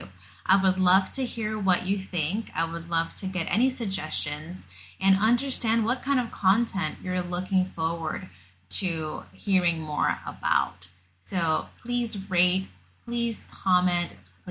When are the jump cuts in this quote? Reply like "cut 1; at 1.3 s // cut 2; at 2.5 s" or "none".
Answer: none